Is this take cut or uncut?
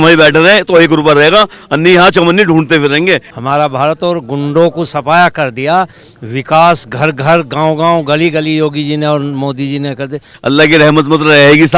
cut